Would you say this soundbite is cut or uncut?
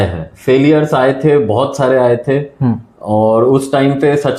uncut